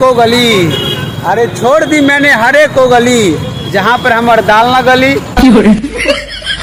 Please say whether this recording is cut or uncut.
uncut